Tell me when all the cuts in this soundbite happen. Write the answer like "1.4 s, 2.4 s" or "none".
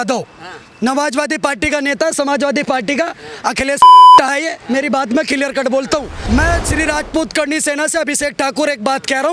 3.8 s, 4.2 s, 6.1 s